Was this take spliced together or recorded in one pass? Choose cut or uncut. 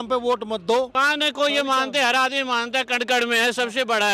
cut